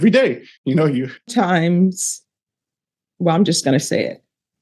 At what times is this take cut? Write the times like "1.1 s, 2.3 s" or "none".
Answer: 1.3 s